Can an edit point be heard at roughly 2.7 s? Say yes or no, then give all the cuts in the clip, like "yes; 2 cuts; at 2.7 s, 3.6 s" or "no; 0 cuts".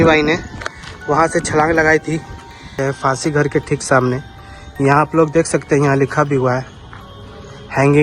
yes; 1 cut; at 2.7 s